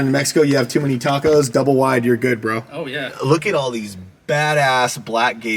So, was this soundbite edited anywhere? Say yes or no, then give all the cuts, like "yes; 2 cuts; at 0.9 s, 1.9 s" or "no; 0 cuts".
yes; 1 cut; at 3.1 s